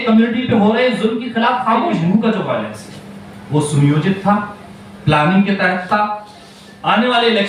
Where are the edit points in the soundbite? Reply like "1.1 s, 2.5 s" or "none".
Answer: 2.0 s